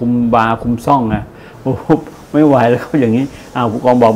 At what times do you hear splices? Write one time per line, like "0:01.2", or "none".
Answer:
none